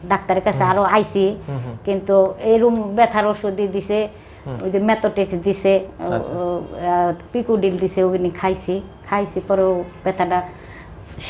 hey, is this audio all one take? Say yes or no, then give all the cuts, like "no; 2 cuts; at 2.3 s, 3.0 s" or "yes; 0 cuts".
yes; 0 cuts